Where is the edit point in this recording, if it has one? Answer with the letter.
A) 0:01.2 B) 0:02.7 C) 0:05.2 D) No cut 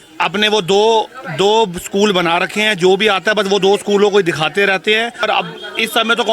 C